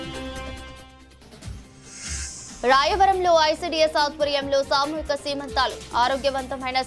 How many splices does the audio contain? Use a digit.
1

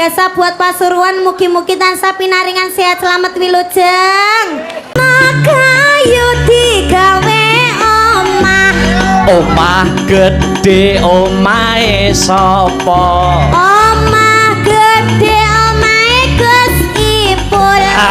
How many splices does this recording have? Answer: 1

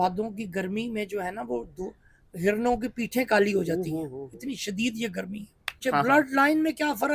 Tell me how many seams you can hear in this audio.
1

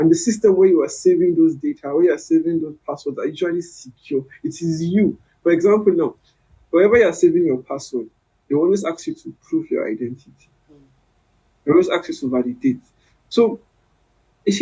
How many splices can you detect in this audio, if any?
0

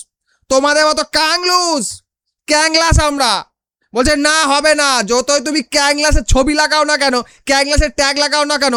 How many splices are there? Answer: 0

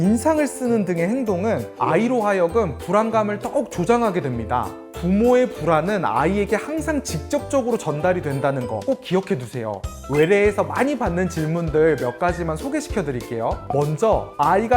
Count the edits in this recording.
1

